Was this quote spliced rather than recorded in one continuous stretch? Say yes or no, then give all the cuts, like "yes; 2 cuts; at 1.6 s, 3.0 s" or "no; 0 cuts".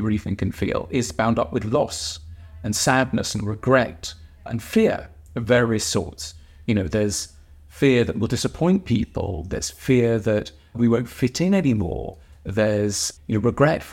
no; 0 cuts